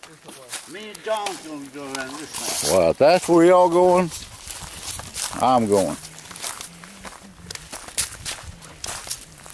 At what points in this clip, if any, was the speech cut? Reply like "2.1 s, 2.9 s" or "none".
7.1 s